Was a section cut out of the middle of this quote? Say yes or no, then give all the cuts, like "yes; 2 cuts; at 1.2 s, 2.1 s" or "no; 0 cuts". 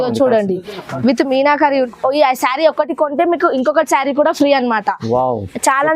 yes; 1 cut; at 1.9 s